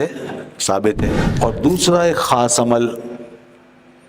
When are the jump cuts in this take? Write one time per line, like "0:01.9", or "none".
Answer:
0:01.2